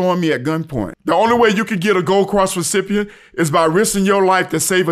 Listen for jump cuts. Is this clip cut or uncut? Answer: cut